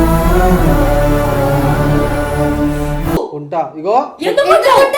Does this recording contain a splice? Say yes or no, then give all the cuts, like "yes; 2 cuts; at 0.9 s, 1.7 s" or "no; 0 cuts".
no; 0 cuts